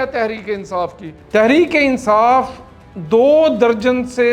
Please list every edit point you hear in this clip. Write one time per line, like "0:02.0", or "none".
0:01.1